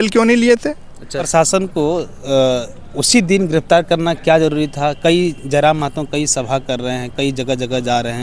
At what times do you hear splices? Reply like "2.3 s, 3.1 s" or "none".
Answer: 1.3 s